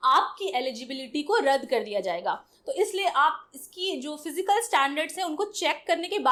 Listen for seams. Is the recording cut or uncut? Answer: uncut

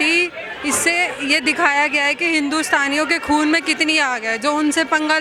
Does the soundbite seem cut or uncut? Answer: uncut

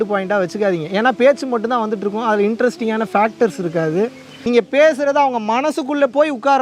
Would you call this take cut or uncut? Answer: cut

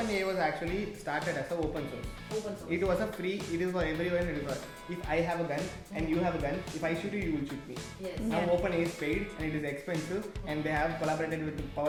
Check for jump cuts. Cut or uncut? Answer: uncut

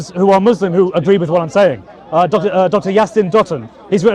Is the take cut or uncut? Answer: uncut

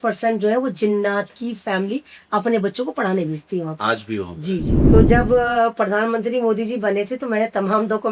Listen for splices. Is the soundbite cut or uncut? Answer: cut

